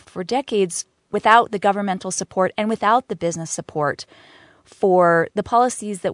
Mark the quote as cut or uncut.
cut